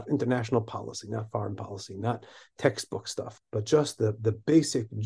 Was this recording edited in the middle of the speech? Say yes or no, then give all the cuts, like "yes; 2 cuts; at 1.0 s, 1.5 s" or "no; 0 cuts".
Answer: yes; 1 cut; at 3.2 s